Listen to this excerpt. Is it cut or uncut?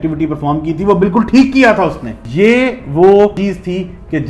cut